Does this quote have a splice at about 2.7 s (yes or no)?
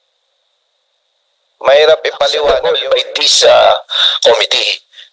yes